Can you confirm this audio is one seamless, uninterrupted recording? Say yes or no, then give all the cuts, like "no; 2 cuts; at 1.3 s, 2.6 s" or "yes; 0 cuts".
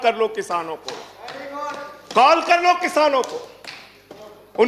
yes; 0 cuts